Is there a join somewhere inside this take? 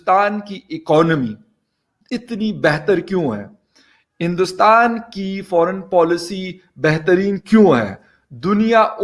no; 0 cuts

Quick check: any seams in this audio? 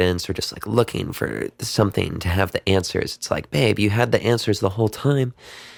no; 0 cuts

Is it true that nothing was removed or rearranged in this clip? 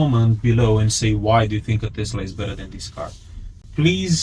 yes; 0 cuts

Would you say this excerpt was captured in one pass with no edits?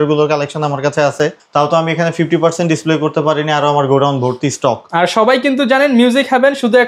yes; 0 cuts

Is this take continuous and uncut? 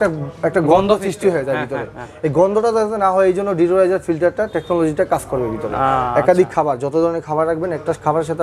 yes; 0 cuts

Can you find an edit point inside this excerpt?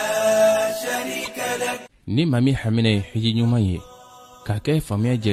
yes; 1 cut; at 1.7 s

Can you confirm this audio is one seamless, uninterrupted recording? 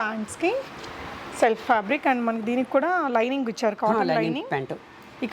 yes; 0 cuts

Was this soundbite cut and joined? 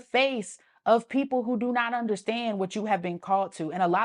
no; 0 cuts

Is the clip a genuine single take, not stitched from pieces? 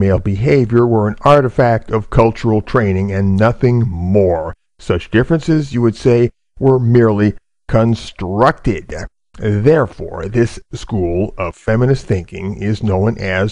no; 1 cut; at 8.9 s

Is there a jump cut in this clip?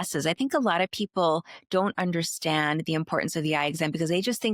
no; 0 cuts

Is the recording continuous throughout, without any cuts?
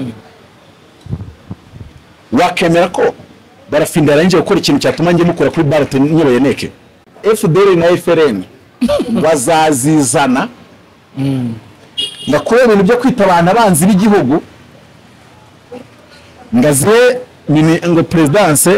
no; 1 cut; at 7.1 s

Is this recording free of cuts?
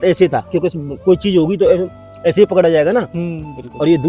yes; 0 cuts

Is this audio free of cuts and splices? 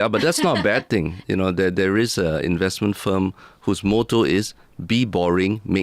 no; 1 cut; at 1.2 s

